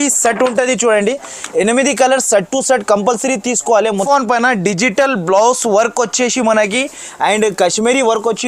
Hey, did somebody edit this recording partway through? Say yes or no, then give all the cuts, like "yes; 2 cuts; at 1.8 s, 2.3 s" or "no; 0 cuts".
yes; 1 cut; at 4.1 s